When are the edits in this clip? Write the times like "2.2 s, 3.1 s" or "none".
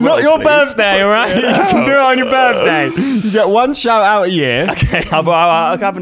4.8 s